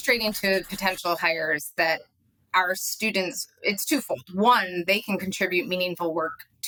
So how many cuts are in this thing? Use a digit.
0